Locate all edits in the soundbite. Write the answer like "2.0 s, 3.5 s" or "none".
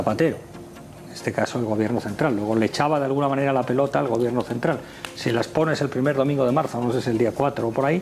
1.5 s